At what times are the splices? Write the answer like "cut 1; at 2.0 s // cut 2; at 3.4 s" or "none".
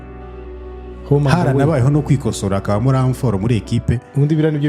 none